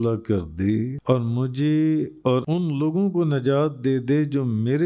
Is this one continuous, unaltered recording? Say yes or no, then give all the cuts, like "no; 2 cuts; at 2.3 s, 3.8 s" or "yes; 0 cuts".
no; 2 cuts; at 1.0 s, 2.4 s